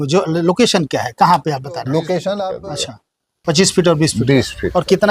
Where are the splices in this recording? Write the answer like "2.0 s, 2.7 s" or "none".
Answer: 2.5 s